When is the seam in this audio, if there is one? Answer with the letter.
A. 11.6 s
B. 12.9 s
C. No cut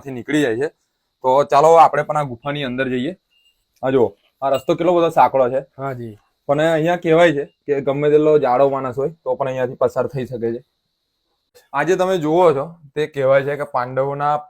A